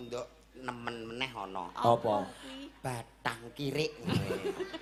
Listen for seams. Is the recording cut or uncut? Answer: uncut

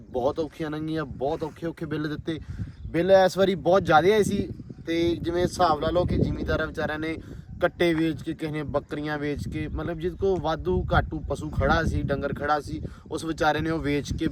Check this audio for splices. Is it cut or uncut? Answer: uncut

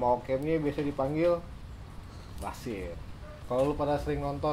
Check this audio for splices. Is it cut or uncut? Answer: cut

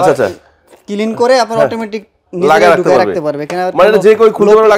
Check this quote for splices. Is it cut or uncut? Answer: uncut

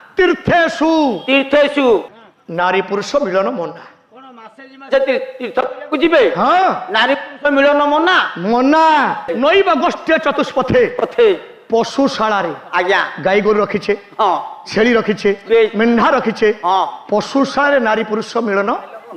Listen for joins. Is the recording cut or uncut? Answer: cut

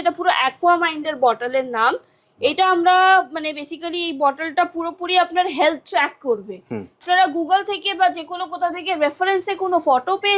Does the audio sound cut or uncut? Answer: cut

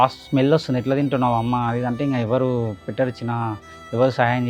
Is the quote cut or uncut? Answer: uncut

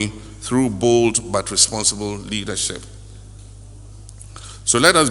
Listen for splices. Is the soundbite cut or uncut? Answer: uncut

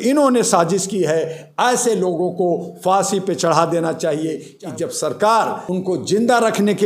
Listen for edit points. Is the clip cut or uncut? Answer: cut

